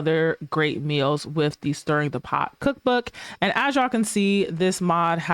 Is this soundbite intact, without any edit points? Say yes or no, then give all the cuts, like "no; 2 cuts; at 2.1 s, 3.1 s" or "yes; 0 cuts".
no; 1 cut; at 3.2 s